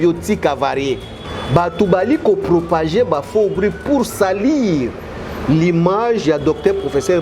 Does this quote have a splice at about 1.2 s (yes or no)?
yes